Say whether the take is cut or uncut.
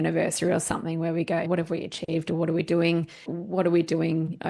cut